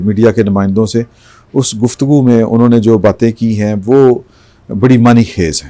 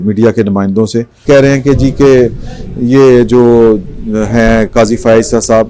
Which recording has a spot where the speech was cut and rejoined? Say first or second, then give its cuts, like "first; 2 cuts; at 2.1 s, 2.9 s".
second; 1 cut; at 1.2 s